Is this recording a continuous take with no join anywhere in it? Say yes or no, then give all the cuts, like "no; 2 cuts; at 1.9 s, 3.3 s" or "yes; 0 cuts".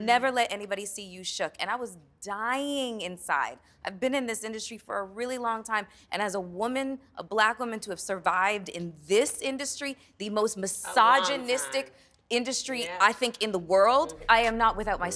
no; 1 cut; at 14.2 s